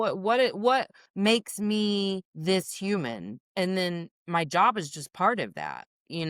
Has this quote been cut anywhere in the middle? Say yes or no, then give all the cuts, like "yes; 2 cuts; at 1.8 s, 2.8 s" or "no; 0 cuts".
yes; 4 cuts; at 1.0 s, 2.3 s, 3.4 s, 4.1 s